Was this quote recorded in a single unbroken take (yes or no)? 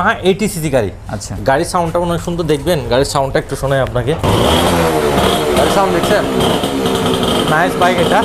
yes